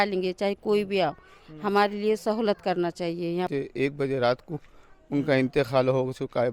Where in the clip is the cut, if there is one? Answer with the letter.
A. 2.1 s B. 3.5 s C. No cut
B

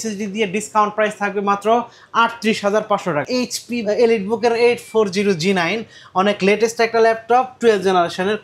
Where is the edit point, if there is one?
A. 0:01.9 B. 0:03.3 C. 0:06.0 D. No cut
B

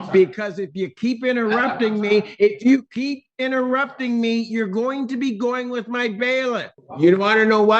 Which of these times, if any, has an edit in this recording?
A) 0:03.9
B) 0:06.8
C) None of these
B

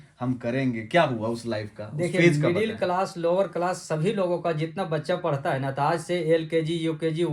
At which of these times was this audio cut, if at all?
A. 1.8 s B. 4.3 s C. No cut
C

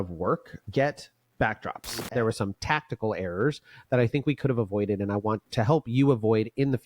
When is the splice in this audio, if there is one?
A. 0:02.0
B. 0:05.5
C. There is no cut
A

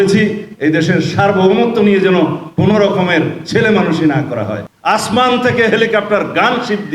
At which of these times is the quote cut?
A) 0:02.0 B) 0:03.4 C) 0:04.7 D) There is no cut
C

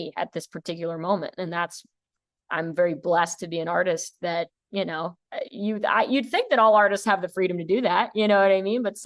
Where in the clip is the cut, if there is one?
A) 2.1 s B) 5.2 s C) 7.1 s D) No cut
B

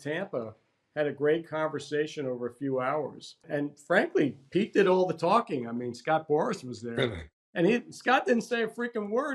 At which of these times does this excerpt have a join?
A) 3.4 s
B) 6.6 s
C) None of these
A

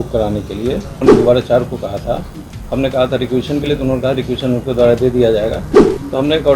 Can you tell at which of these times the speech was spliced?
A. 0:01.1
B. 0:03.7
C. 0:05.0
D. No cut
A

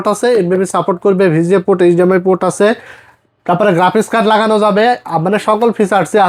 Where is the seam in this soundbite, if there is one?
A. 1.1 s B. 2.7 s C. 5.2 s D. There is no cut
D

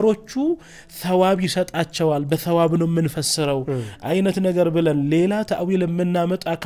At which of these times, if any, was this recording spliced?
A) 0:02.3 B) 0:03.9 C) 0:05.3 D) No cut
D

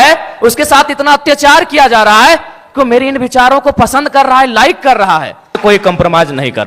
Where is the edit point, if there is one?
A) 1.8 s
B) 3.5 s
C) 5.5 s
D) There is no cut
C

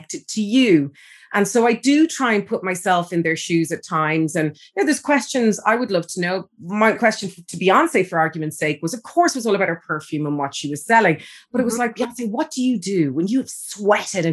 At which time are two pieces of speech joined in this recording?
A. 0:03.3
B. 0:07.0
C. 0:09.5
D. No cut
B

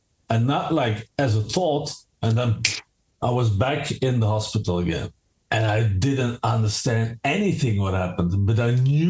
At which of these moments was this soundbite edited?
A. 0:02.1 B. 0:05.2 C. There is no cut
A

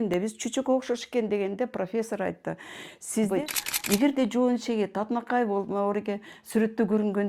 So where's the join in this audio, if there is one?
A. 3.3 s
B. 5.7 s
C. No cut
A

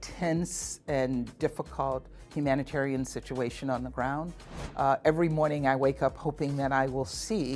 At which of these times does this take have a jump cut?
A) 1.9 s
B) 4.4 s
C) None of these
B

